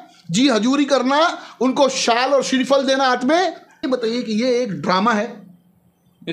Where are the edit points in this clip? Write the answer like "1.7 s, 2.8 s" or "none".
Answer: 3.8 s